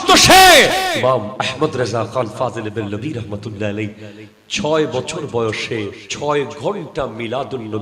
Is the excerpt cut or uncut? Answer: cut